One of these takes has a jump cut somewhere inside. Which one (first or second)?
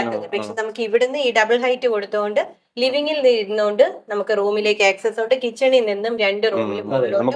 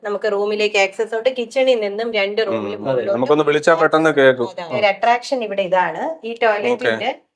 second